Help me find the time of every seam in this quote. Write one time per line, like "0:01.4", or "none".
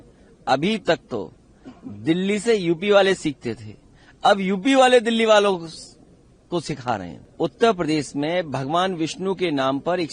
0:07.2